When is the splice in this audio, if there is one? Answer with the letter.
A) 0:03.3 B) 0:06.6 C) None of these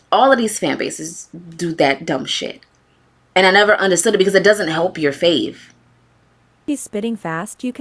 B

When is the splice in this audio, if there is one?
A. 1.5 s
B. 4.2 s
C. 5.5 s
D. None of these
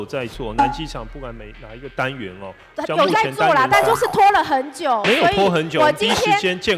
D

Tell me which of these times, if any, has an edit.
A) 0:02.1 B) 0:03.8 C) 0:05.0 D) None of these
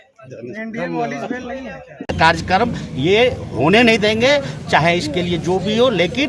A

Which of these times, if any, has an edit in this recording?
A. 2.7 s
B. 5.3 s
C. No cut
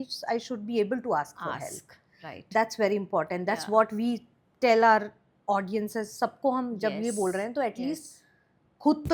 C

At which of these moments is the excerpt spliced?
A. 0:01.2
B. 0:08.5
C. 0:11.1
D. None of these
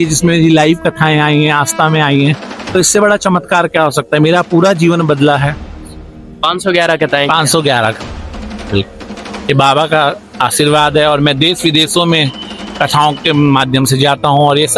D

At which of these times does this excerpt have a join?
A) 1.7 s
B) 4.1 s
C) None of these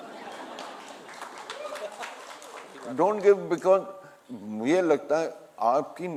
C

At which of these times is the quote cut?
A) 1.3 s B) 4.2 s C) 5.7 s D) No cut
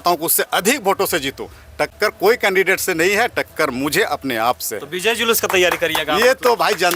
D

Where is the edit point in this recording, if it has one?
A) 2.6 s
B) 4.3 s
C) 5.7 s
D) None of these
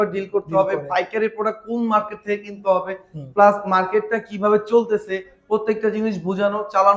D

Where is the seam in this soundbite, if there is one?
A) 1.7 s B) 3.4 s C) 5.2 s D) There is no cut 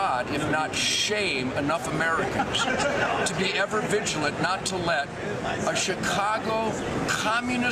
B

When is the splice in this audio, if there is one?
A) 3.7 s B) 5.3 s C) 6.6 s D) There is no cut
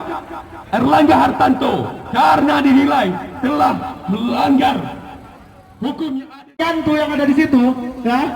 C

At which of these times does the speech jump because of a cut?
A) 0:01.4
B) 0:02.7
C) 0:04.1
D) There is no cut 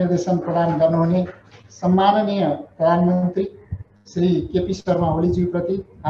D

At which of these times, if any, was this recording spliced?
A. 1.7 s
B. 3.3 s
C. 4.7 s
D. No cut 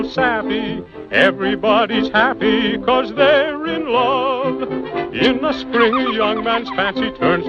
C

